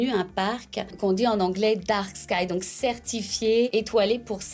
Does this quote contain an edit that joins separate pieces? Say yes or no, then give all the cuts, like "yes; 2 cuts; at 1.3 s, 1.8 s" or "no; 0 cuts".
yes; 2 cuts; at 0.9 s, 3.7 s